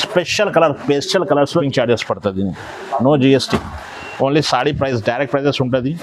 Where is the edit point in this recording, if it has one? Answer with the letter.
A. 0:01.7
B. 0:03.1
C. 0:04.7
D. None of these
A